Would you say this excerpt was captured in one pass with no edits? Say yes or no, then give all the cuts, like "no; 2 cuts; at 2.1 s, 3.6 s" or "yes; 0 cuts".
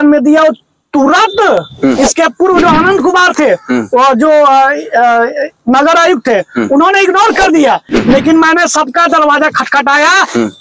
yes; 0 cuts